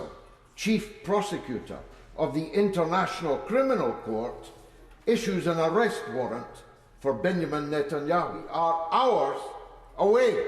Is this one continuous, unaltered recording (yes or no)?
no